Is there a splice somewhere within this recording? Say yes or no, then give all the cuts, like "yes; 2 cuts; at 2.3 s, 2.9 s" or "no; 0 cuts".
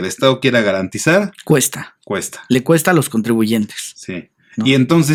no; 0 cuts